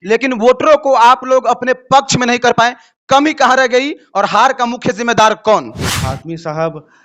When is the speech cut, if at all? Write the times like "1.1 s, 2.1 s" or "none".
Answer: 5.8 s